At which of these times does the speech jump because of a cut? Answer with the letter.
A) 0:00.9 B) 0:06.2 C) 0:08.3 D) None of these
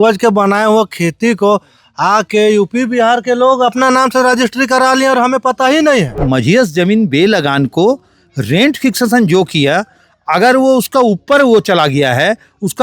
B